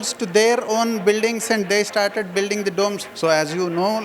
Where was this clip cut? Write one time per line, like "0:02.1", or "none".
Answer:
0:03.0